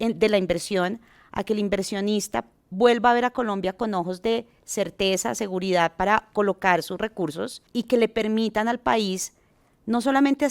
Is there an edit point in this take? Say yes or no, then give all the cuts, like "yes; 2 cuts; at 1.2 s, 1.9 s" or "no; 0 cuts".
yes; 1 cut; at 7.7 s